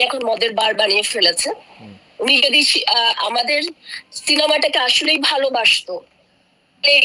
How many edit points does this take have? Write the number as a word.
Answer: zero